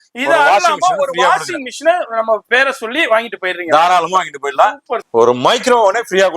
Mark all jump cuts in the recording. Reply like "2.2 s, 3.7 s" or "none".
4.9 s

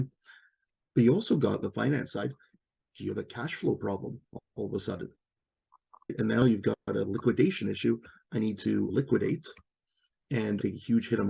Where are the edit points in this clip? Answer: 6.4 s, 8.9 s, 10.6 s

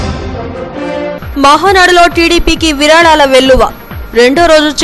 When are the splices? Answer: 1.2 s

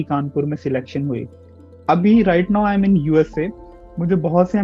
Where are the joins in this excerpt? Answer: none

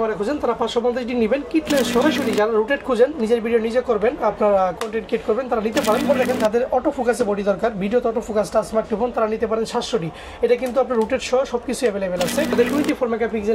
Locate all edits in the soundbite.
2.0 s, 6.1 s, 12.5 s

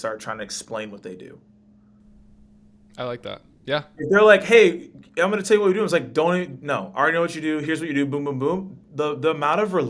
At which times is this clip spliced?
none

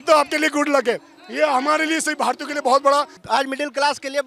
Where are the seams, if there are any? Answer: 3.2 s

